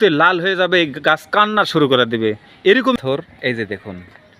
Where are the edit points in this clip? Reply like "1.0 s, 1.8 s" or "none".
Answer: 3.0 s